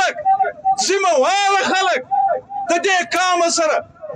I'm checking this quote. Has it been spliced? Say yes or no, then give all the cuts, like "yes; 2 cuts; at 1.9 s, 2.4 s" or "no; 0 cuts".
no; 0 cuts